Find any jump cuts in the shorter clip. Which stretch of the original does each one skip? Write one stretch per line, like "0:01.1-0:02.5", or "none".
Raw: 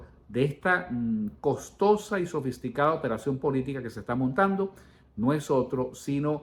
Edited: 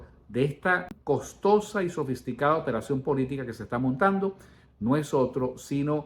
0:00.9-0:01.3